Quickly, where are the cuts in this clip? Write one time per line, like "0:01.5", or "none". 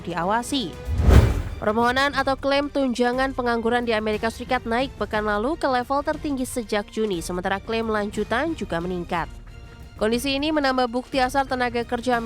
0:01.0